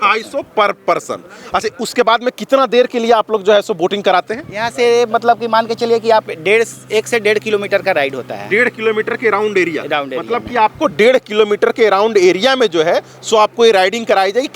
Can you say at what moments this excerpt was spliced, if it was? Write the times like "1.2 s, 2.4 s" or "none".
none